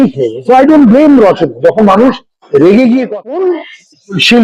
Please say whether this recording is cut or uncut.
cut